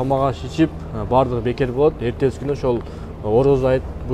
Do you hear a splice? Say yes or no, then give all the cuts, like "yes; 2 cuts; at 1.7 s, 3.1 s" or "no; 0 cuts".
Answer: no; 0 cuts